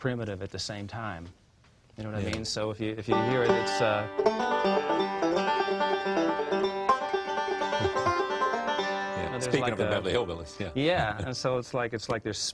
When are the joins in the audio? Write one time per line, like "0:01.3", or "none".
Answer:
none